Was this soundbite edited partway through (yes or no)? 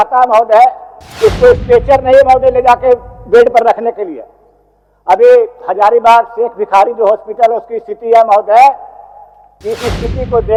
no